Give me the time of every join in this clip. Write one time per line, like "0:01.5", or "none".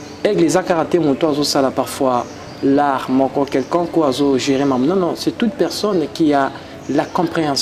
none